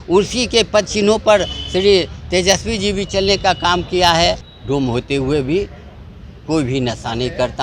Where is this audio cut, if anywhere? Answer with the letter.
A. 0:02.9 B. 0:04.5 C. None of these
B